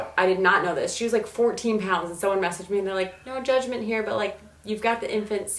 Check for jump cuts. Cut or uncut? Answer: uncut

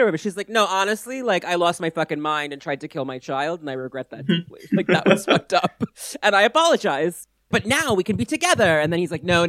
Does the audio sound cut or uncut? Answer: uncut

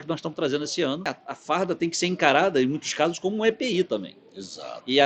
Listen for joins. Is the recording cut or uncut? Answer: cut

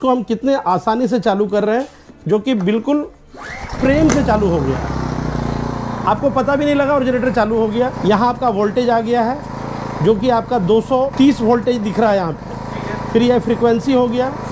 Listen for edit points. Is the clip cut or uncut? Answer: uncut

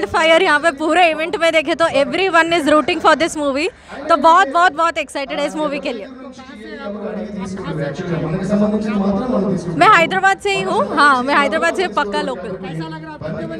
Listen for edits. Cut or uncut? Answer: uncut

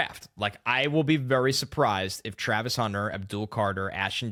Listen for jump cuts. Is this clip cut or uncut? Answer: uncut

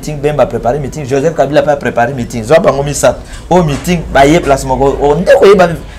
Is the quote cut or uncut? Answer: uncut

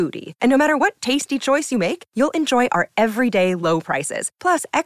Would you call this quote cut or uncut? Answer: uncut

